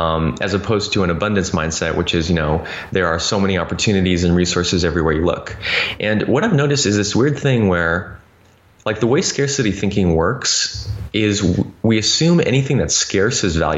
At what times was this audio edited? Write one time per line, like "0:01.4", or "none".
none